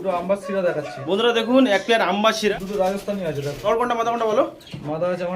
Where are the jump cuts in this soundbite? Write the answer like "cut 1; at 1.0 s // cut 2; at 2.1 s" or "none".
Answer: cut 1; at 2.5 s // cut 2; at 3.6 s

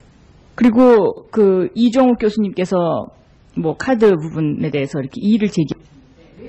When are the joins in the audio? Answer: cut 1; at 2.2 s

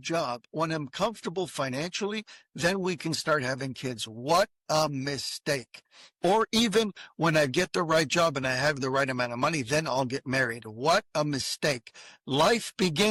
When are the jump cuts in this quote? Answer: none

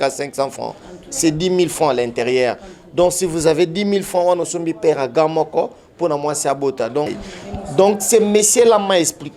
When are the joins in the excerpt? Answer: cut 1; at 7.1 s

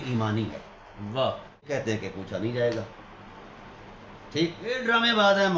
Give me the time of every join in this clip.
cut 1; at 1.7 s // cut 2; at 4.8 s

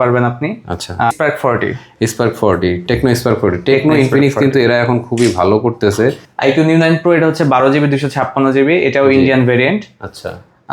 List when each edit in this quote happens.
cut 1; at 1.1 s // cut 2; at 6.3 s

